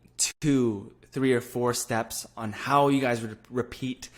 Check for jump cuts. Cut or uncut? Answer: uncut